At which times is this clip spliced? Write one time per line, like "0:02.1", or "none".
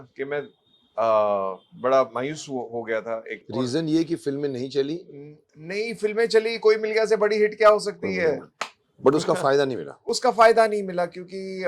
0:03.4